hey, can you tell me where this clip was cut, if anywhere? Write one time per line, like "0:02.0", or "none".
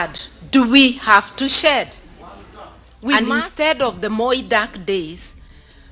0:03.2